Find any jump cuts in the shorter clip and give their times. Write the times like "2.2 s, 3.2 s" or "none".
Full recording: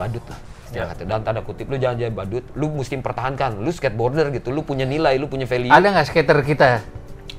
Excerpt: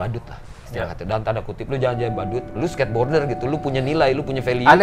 2.5 s